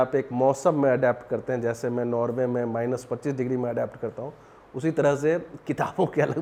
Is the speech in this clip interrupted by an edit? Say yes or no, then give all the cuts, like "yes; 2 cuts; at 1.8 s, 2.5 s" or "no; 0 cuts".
no; 0 cuts